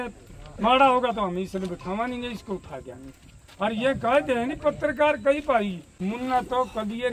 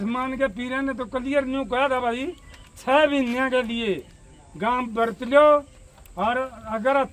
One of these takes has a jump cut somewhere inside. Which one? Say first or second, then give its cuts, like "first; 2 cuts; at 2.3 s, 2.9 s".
first; 1 cut; at 5.9 s